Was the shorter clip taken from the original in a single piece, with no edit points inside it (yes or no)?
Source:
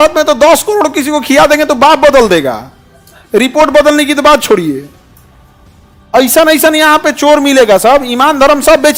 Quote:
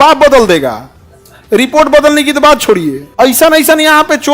no